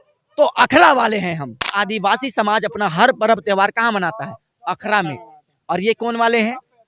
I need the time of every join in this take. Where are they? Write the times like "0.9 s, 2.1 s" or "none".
1.7 s